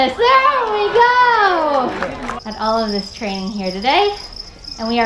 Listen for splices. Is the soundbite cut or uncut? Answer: cut